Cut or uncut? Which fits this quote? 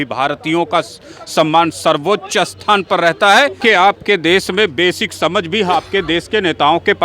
cut